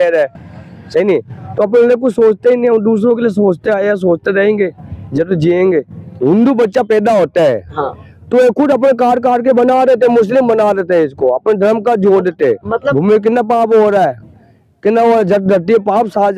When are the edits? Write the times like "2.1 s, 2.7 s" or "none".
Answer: 6.2 s, 12.9 s